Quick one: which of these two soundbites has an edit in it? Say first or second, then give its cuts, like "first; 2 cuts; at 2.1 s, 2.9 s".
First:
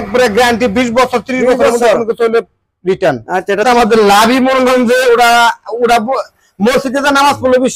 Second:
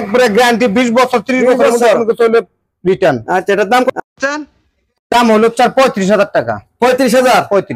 first; 1 cut; at 3.6 s